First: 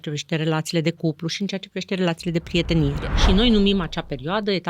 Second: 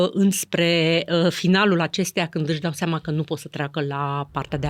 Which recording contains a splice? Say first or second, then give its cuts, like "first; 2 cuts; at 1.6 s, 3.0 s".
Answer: first; 1 cut; at 3.1 s